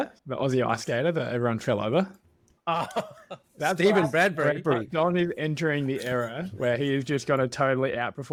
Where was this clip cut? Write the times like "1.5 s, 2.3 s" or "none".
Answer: none